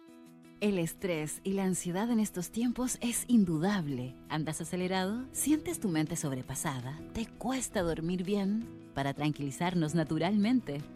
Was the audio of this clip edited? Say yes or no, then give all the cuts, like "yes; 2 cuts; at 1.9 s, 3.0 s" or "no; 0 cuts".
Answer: no; 0 cuts